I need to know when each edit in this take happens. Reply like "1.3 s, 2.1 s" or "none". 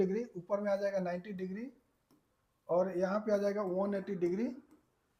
none